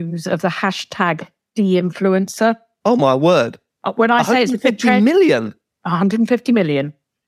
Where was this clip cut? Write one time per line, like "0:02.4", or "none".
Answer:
0:01.3
0:02.7